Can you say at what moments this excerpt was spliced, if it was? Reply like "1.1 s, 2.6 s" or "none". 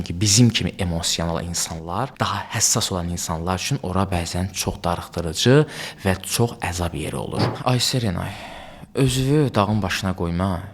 2.1 s, 7.5 s